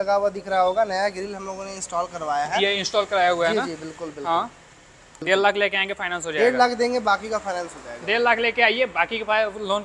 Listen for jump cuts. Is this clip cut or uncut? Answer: cut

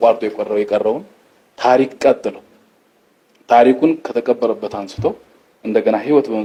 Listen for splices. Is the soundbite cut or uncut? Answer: uncut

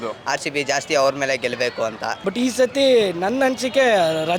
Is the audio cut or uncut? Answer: cut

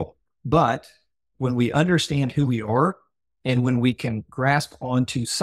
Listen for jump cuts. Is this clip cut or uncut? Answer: cut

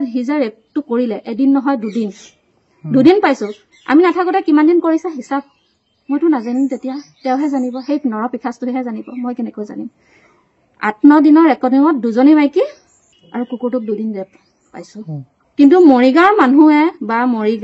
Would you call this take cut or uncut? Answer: uncut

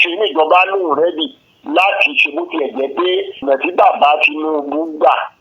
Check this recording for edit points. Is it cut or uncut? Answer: cut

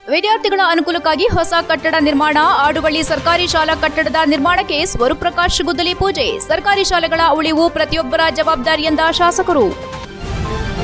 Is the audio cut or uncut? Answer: cut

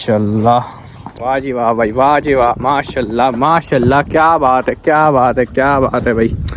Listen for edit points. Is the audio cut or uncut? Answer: cut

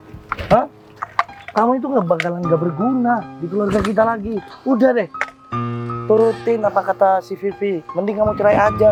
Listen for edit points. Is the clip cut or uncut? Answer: uncut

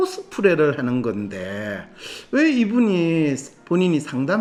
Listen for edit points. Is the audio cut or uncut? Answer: uncut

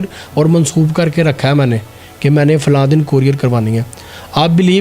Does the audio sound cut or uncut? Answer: uncut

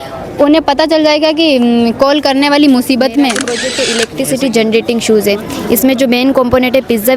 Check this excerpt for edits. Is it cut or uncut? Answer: cut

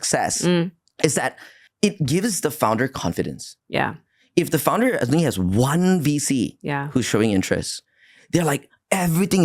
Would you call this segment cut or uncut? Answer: uncut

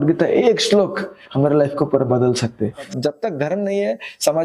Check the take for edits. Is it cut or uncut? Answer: cut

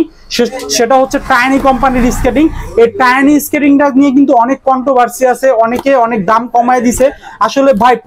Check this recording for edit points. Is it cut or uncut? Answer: uncut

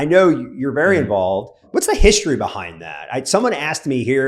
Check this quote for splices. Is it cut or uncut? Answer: cut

